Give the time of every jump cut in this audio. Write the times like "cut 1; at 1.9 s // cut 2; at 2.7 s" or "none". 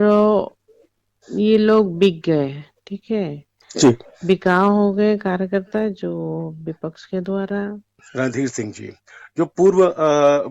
cut 1; at 8.0 s